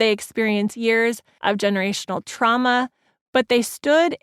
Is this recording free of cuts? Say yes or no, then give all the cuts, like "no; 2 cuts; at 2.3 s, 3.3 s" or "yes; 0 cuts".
no; 1 cut; at 1.3 s